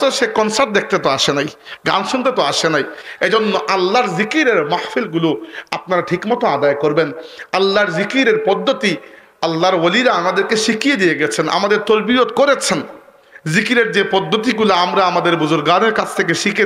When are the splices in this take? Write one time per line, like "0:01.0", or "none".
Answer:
none